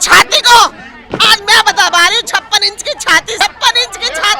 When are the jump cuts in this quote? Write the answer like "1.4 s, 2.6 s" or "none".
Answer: 3.4 s